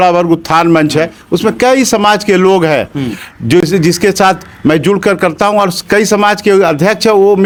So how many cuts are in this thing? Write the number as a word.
zero